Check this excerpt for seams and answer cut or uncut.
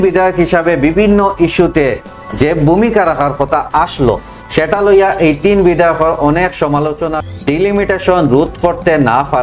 cut